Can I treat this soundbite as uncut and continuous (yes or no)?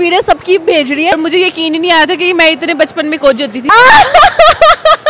no